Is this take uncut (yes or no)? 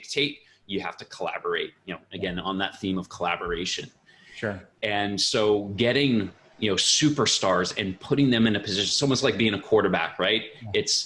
yes